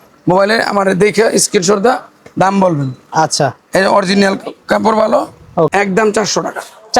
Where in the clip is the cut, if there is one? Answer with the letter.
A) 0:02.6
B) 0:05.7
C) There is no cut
B